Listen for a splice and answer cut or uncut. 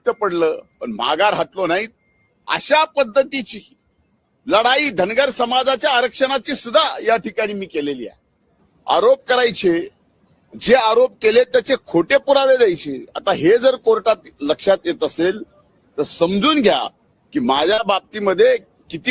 cut